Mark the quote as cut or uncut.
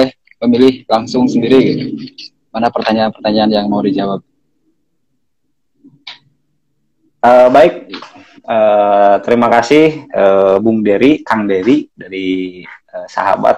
uncut